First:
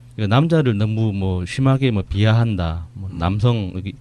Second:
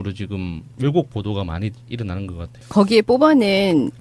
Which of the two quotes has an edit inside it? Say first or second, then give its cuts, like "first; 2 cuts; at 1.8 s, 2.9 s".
second; 1 cut; at 2.7 s